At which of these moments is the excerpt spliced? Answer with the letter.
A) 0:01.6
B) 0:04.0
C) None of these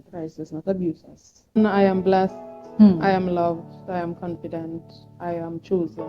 A